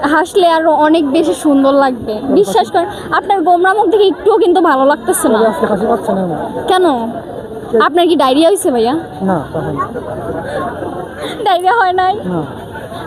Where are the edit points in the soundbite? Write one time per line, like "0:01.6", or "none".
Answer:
0:02.4
0:09.3
0:11.4